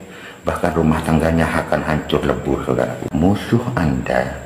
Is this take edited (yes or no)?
yes